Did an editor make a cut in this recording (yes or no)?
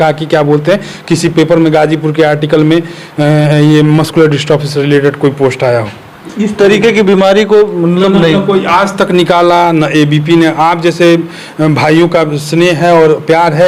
no